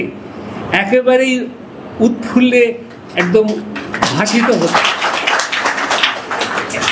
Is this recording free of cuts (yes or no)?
yes